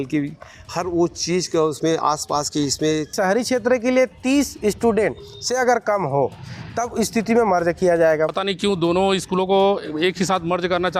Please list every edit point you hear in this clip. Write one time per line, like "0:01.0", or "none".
0:03.1
0:08.4